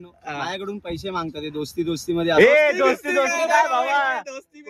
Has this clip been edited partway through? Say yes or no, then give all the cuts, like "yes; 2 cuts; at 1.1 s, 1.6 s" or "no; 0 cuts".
no; 0 cuts